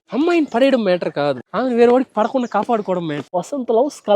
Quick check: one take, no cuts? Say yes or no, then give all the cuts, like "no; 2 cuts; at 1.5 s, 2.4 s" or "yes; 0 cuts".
no; 1 cut; at 3.2 s